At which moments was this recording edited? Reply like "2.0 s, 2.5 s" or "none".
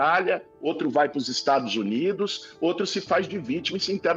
none